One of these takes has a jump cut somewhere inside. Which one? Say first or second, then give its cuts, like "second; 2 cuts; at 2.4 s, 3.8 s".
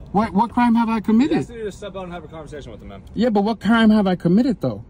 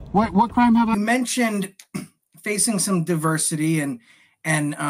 second; 1 cut; at 0.9 s